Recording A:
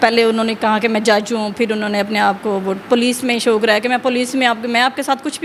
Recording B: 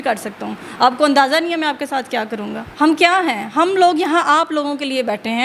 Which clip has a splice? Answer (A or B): B